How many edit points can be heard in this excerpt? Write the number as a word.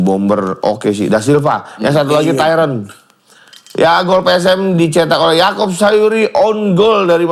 zero